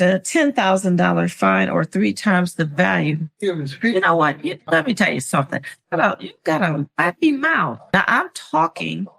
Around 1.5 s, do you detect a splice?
no; 1 cut; at 7.8 s

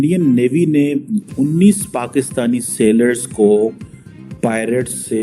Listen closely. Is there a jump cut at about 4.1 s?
no; 0 cuts

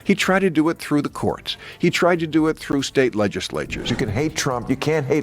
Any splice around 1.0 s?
no; 1 cut; at 3.9 s

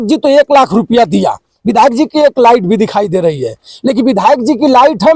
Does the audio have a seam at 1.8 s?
no; 0 cuts

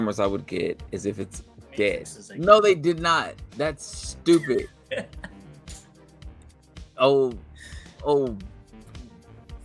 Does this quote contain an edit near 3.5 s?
no; 3 cuts; at 2.2 s, 5.3 s, 6.6 s

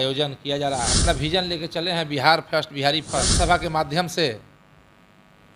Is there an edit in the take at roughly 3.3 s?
yes; 2 cuts; at 1.0 s, 3.3 s

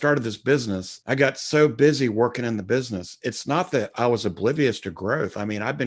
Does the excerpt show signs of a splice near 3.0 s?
no; 1 cut; at 0.9 s

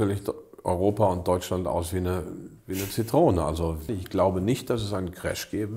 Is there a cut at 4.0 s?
yes; 1 cut; at 4.0 s

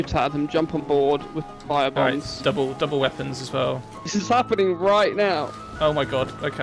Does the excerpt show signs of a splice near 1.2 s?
no; 1 cut; at 4.1 s

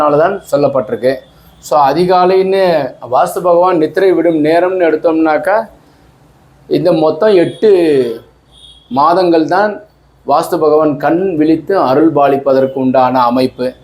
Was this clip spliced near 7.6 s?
no; 0 cuts

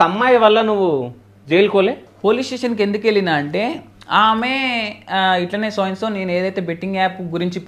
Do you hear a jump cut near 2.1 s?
yes; 1 cut; at 2.1 s

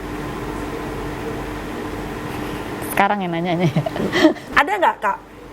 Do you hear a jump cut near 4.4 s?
yes; 1 cut; at 4.4 s

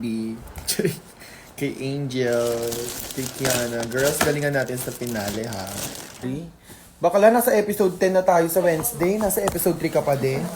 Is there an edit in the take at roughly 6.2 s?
yes; 1 cut; at 6.2 s

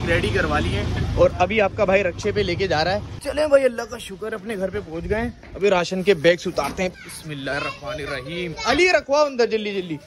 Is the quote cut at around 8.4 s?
no; 2 cuts; at 3.2 s, 6.9 s

